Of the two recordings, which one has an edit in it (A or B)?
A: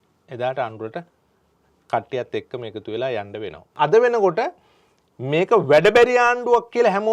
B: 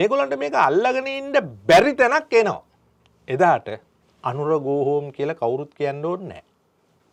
A